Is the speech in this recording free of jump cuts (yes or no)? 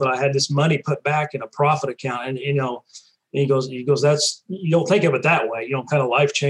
yes